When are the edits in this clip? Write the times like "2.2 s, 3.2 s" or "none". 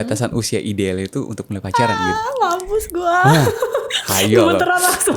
none